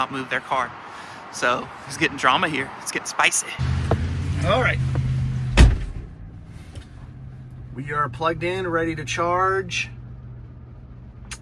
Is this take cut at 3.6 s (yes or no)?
yes